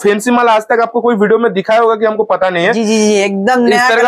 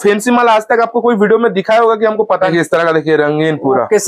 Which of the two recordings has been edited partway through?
second; 1 cut; at 2.5 s

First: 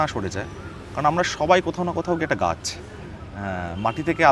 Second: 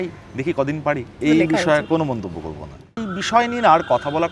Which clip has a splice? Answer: second; 2 cuts; at 1.1 s, 3.0 s

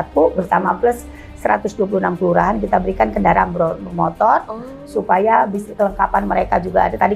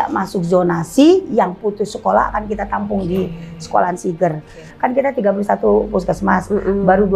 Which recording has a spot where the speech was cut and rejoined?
second; 1 cut; at 4.7 s

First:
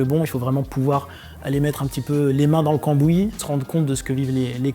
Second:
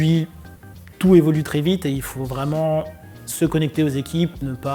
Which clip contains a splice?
first; 1 cut; at 3.4 s

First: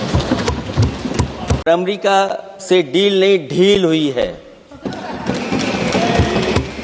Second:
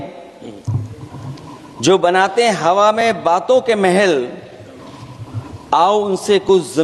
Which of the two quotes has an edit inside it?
first; 1 cut; at 1.7 s

